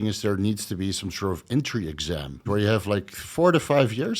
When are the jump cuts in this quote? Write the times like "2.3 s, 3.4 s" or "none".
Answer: 2.4 s